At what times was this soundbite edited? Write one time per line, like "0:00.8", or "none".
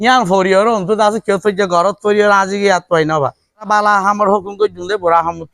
0:03.6